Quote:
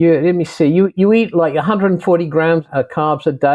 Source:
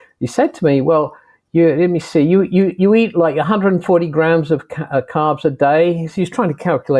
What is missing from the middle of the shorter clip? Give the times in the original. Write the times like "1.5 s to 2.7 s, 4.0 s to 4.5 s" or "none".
2.5 s to 2.8 s, 4.4 s to 4.8 s